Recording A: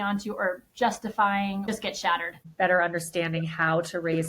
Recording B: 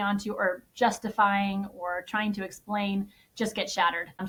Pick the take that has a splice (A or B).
A